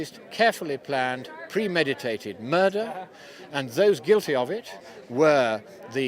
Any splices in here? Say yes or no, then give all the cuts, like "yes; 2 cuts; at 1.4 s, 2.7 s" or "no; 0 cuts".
yes; 1 cut; at 4.8 s